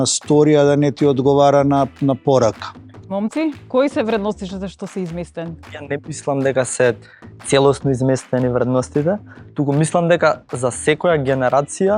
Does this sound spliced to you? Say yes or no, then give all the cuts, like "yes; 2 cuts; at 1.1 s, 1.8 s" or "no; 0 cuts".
yes; 2 cuts; at 3.0 s, 5.8 s